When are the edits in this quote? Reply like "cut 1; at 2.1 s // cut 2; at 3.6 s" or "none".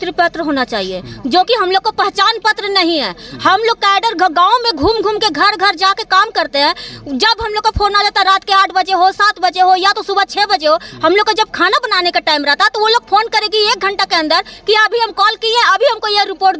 none